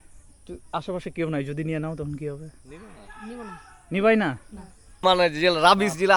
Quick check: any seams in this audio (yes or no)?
yes